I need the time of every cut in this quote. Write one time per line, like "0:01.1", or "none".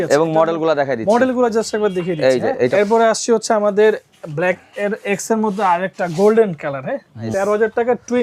0:02.7
0:07.3